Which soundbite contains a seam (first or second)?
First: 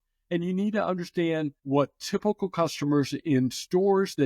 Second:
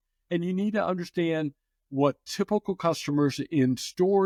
first